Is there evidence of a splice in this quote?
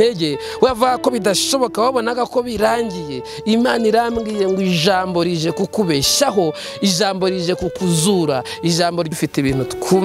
yes; 1 cut; at 9.1 s

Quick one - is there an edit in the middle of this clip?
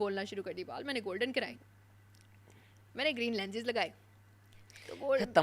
no; 0 cuts

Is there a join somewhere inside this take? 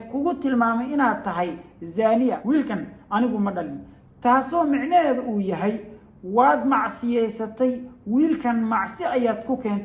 yes; 1 cut; at 2.4 s

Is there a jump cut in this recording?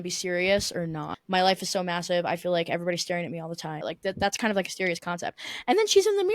yes; 2 cuts; at 1.1 s, 3.8 s

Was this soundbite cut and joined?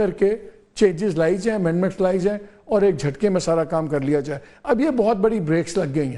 no; 0 cuts

